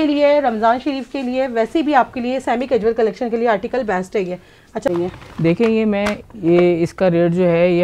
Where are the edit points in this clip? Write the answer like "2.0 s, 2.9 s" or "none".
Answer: 4.9 s

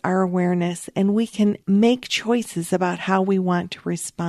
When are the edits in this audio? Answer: none

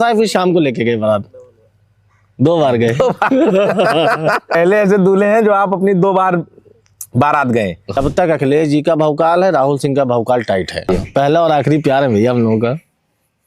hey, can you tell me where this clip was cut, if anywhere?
4.5 s, 8.0 s, 10.9 s

